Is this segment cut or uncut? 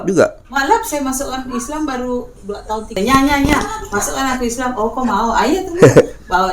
cut